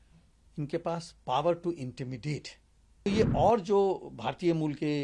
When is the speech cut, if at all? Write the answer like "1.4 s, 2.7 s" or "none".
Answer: 3.1 s